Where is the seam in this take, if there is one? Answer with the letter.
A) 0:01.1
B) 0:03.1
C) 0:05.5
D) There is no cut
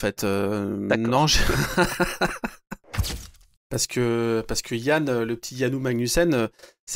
B